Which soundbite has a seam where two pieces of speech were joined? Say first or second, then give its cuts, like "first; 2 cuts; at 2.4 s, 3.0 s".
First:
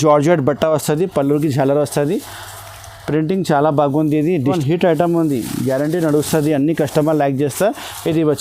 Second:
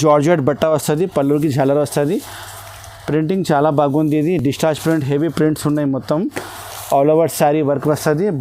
first; 1 cut; at 4.5 s